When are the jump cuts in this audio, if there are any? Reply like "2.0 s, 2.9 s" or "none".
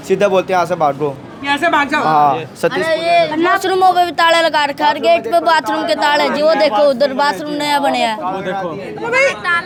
none